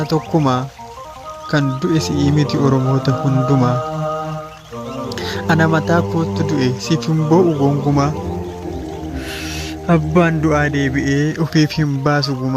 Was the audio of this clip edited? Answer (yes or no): yes